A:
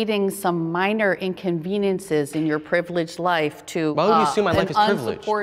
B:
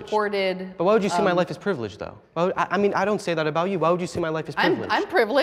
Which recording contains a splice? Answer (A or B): B